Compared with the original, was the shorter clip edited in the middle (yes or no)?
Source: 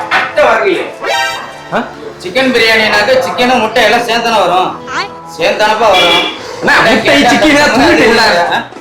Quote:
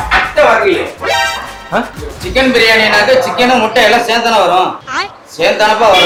no